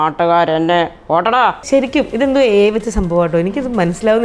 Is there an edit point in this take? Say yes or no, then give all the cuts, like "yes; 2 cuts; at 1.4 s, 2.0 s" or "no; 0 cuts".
yes; 1 cut; at 1.6 s